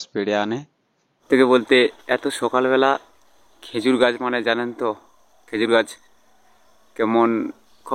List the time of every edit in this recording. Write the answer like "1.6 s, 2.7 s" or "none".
1.2 s

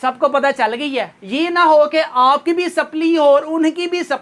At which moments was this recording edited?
1.2 s

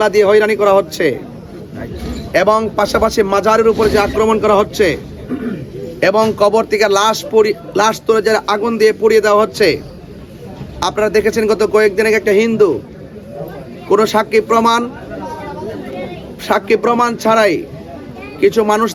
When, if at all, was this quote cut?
none

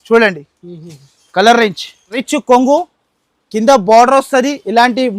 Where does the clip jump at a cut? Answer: 2.2 s

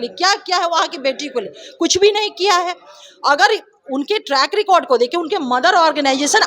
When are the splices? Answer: none

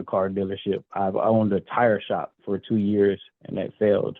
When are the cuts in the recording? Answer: none

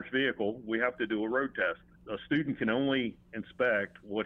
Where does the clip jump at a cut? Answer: 1.9 s

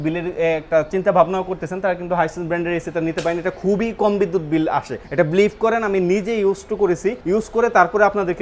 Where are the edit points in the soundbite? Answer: 5.0 s, 7.2 s

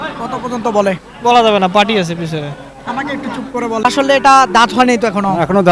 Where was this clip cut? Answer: 3.9 s

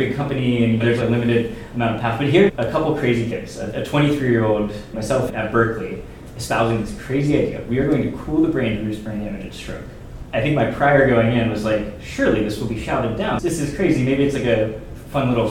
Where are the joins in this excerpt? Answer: 2.5 s

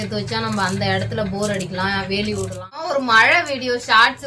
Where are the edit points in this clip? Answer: 2.9 s

